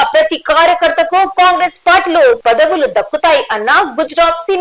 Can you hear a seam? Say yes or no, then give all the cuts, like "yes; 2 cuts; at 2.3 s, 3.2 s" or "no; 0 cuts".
no; 0 cuts